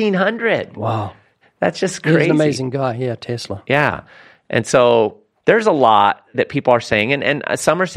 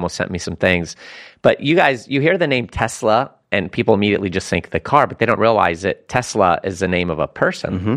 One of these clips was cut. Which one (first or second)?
first